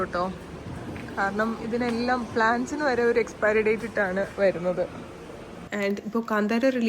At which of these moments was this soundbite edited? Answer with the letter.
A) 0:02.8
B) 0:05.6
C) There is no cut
B